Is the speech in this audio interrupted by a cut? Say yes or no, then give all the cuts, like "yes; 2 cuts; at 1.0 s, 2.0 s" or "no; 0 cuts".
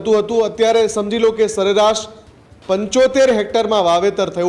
no; 0 cuts